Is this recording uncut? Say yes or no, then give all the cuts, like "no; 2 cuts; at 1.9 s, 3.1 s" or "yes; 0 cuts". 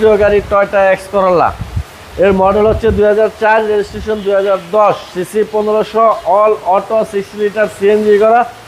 yes; 0 cuts